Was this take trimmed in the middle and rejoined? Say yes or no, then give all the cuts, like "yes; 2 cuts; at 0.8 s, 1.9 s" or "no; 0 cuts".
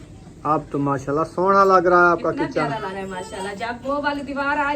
yes; 1 cut; at 2.9 s